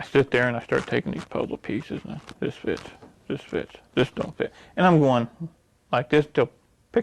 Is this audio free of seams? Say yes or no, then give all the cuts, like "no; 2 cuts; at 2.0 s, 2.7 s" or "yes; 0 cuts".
yes; 0 cuts